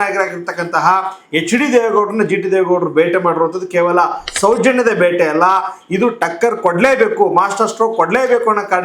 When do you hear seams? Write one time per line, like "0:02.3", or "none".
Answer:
none